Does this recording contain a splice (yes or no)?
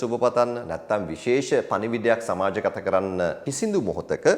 yes